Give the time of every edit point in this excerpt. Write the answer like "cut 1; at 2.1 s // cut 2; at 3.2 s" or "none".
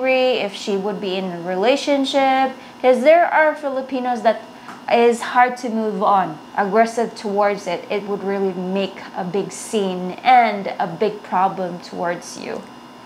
cut 1; at 6.4 s